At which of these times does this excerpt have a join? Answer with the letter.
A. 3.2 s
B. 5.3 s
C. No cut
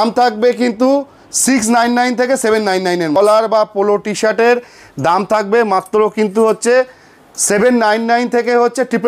A